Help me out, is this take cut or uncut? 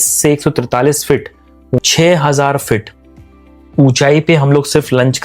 cut